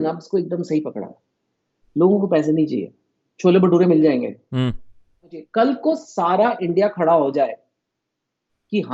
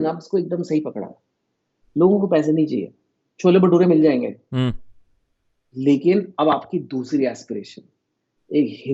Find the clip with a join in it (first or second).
first